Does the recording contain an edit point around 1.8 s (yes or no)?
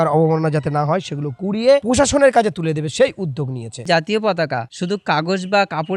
yes